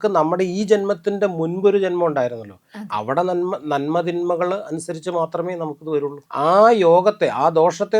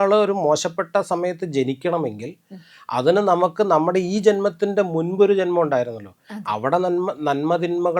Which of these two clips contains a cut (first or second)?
first